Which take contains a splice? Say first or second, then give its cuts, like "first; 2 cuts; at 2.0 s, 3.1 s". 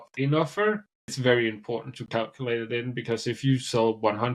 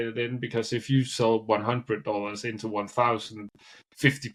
first; 1 cut; at 1.2 s